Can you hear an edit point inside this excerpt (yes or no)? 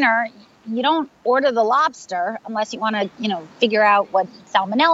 no